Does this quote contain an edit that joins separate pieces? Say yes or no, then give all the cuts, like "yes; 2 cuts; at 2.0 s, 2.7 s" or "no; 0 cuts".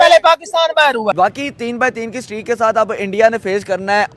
yes; 1 cut; at 1.1 s